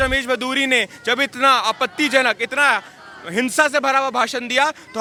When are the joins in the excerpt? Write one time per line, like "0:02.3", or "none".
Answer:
none